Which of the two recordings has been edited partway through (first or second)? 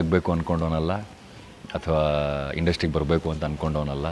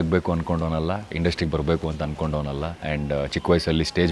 second